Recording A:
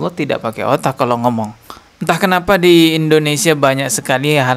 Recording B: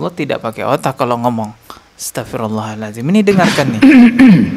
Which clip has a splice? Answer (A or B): A